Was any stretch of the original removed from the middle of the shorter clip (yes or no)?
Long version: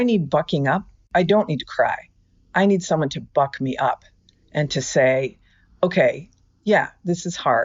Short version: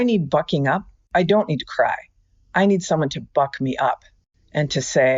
no